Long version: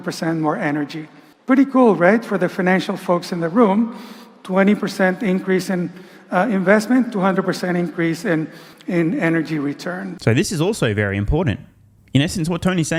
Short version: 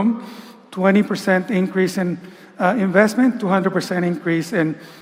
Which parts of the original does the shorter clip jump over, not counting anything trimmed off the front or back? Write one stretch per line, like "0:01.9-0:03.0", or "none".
none